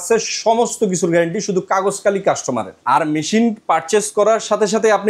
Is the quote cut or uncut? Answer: cut